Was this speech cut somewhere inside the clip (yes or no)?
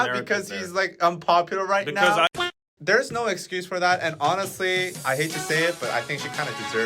yes